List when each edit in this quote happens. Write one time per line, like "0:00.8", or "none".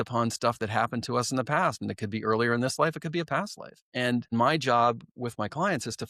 0:04.3

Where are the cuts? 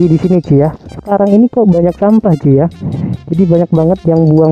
0:01.0

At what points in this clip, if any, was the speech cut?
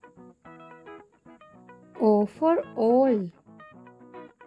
0:01.5
0:03.4

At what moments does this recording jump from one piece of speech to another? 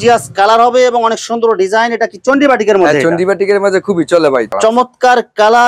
0:04.5

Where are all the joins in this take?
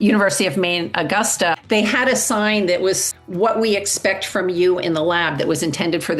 0:01.6
0:03.1

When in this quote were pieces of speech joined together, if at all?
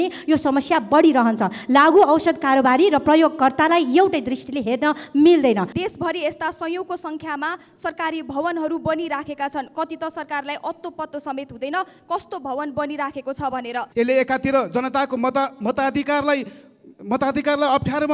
0:05.7
0:13.9

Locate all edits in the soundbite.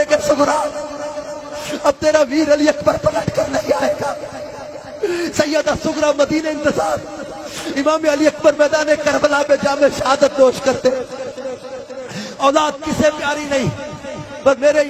none

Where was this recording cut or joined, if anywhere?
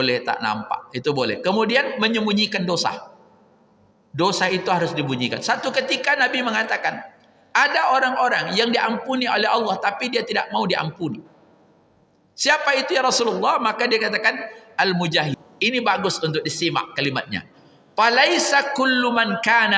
0:15.3

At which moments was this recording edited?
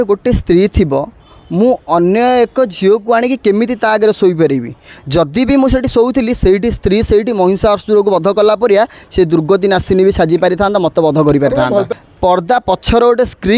0:11.9

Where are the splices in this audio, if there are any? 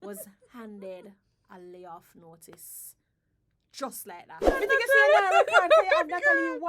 0:04.5

